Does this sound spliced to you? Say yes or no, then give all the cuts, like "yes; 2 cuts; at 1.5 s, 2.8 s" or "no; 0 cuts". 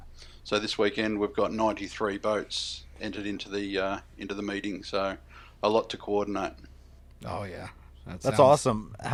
no; 0 cuts